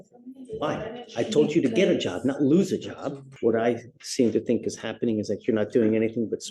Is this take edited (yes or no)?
yes